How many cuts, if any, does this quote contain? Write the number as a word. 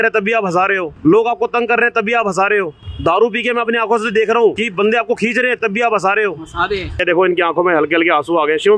four